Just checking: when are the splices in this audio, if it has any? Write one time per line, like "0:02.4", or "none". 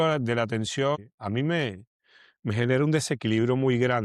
0:01.0